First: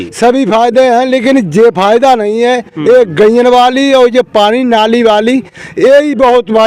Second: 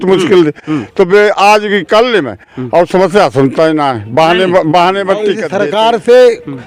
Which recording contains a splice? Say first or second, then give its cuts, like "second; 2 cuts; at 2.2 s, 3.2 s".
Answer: second; 1 cut; at 5.4 s